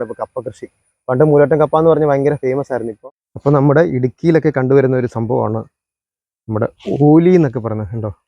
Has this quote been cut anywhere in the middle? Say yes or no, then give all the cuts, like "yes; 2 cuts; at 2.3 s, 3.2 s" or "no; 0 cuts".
yes; 1 cut; at 2.9 s